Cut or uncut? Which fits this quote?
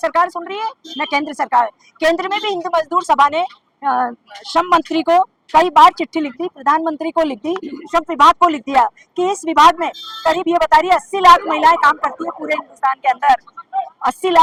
uncut